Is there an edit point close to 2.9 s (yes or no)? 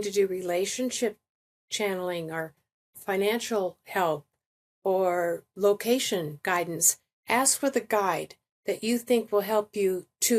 yes